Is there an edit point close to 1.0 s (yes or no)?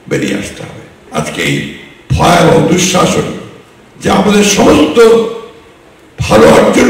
yes